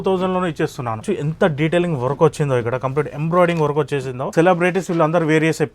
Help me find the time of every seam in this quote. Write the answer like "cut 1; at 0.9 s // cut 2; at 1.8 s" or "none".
cut 1; at 1.1 s // cut 2; at 4.3 s

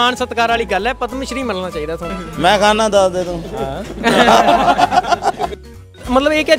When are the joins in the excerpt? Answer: cut 1; at 2.1 s // cut 2; at 5.7 s

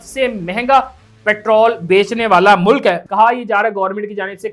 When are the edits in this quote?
cut 1; at 3.0 s

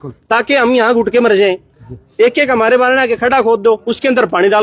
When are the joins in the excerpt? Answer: none

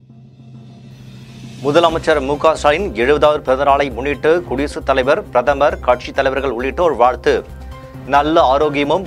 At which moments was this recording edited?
cut 1; at 1.6 s

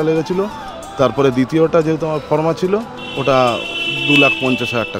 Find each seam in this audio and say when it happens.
none

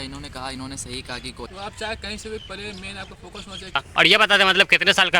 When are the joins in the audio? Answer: cut 1; at 1.5 s // cut 2; at 3.8 s

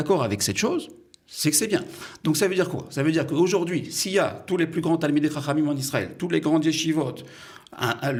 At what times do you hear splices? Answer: none

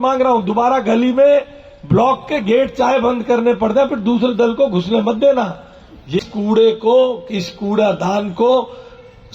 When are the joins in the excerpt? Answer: cut 1; at 6.2 s

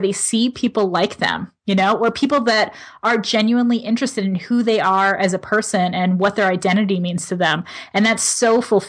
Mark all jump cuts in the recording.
none

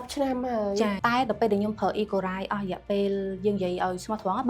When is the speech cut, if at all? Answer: cut 1; at 1.0 s

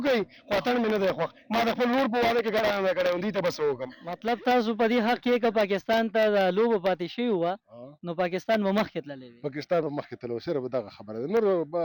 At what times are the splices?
cut 1; at 4.1 s

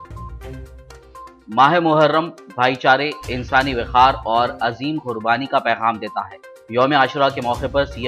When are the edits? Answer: cut 1; at 1.4 s

